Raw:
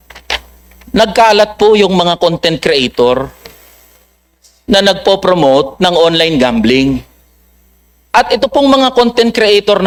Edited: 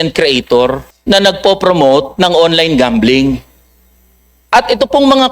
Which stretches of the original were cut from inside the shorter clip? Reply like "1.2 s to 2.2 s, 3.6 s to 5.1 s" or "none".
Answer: 3.4 s to 4.5 s

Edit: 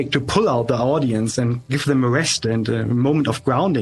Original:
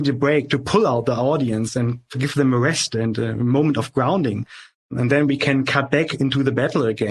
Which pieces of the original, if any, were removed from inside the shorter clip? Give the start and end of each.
2.0 s to 2.1 s

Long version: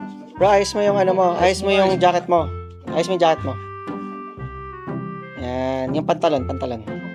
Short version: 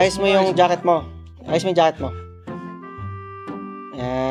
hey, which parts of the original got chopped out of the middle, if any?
none

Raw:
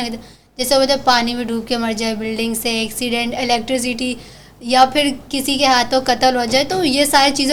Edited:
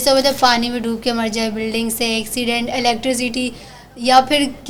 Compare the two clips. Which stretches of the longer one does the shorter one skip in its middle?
none

